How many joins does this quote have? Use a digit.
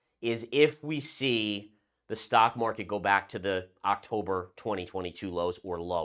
0